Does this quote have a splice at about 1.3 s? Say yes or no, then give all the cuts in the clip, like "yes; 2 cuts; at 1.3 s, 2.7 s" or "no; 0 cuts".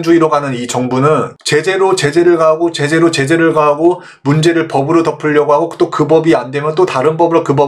yes; 1 cut; at 1.3 s